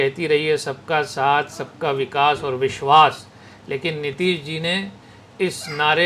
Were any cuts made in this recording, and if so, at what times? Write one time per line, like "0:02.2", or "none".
none